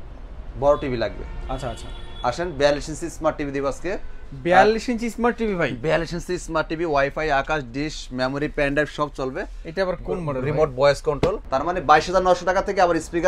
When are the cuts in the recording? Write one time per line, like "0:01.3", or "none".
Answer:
0:11.4